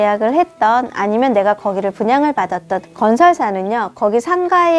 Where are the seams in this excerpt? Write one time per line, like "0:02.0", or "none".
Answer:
0:02.8